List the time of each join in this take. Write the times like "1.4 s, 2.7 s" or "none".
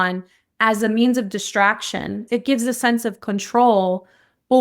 2.2 s